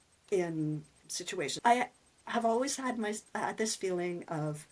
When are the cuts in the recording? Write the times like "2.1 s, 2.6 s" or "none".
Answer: 1.5 s